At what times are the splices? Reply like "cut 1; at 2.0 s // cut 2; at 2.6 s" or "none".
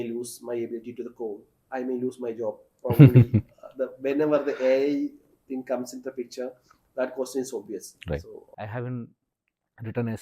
cut 1; at 1.5 s // cut 2; at 8.4 s